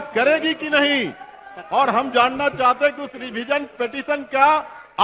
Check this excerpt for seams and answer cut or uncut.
uncut